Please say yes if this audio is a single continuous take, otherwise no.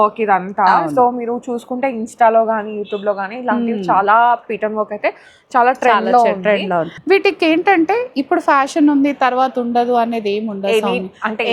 no